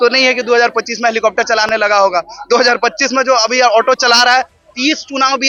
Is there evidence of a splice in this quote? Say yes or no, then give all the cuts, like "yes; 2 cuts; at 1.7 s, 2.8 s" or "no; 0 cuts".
no; 0 cuts